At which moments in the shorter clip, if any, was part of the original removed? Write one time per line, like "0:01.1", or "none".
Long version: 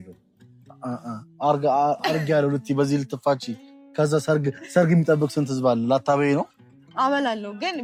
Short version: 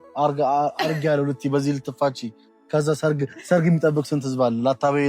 none